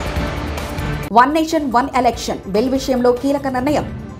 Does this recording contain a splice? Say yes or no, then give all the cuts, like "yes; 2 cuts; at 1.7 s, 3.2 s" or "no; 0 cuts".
yes; 1 cut; at 1.0 s